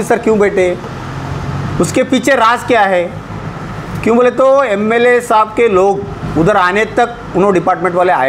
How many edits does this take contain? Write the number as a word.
zero